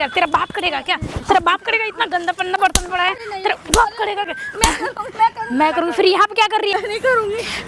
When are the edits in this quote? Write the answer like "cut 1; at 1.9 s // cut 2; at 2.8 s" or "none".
none